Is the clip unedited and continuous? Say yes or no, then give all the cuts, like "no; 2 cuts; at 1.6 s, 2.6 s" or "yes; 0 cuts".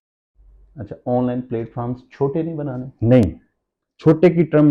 yes; 0 cuts